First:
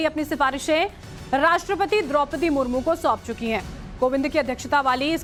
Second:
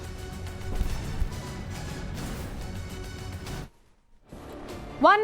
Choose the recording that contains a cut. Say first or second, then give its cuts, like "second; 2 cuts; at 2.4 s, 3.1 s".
second; 1 cut; at 3.3 s